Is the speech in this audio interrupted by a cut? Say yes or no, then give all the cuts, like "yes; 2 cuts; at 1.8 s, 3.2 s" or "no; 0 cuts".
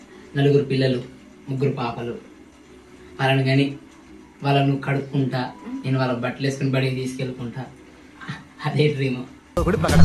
no; 0 cuts